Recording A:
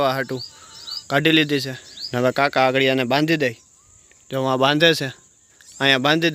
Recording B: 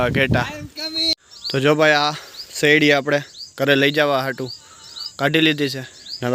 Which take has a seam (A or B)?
B